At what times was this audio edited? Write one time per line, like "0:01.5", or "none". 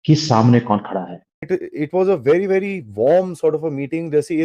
0:01.4